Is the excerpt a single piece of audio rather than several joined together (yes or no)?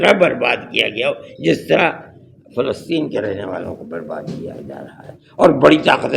yes